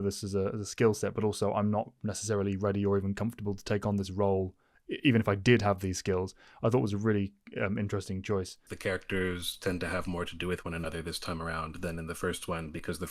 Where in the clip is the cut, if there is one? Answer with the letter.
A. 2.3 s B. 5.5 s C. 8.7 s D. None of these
C